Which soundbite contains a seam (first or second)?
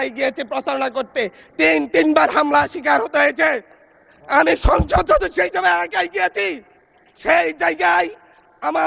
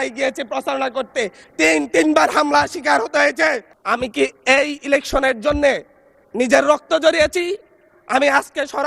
second